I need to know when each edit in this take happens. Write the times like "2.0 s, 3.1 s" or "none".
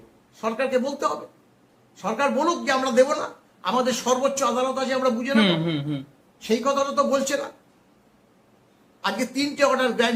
none